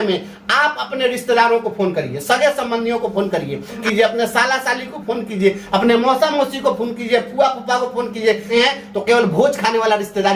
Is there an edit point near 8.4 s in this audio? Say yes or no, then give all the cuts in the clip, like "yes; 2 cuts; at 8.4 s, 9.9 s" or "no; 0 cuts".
yes; 2 cuts; at 3.8 s, 8.4 s